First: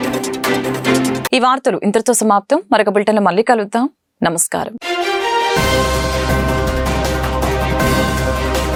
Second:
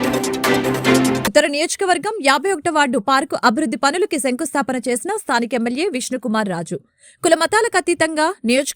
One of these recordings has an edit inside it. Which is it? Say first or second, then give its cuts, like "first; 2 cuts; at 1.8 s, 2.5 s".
second; 1 cut; at 1.2 s